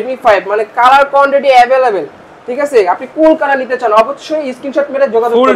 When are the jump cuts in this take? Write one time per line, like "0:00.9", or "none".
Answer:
none

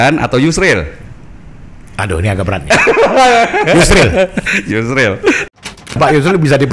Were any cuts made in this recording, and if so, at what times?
0:05.8

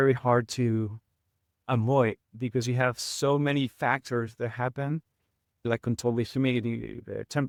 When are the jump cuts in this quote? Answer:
none

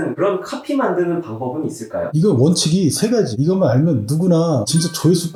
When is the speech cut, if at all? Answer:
none

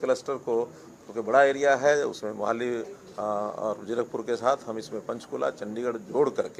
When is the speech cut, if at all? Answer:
none

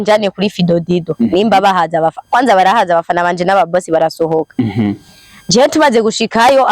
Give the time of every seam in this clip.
none

